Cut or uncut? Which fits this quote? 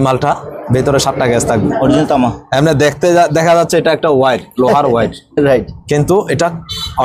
uncut